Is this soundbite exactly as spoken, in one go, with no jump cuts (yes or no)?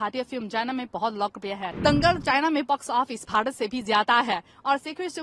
no